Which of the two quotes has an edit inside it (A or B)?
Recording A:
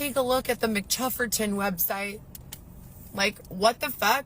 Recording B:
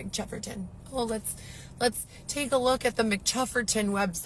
A